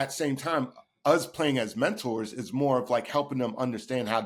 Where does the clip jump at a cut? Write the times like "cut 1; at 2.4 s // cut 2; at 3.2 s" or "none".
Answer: none